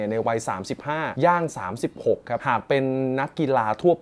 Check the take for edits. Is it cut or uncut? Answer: uncut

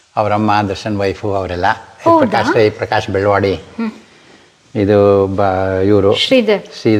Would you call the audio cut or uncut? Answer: uncut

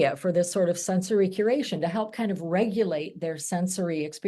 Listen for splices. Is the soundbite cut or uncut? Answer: uncut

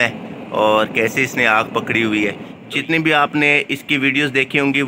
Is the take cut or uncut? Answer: cut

